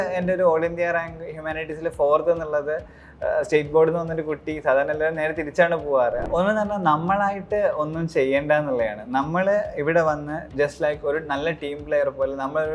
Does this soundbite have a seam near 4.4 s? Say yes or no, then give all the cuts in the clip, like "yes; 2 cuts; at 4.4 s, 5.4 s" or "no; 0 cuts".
no; 1 cut; at 6.2 s